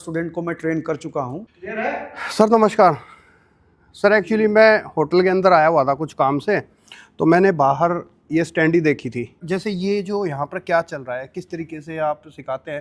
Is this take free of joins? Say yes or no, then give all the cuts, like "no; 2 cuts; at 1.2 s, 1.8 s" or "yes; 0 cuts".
no; 2 cuts; at 1.4 s, 9.4 s